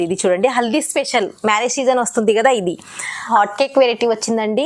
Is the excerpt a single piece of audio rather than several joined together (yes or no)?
no